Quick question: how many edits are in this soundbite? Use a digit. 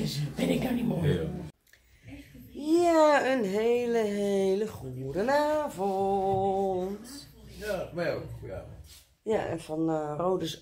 1